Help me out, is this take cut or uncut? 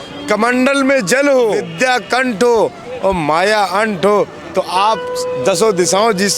cut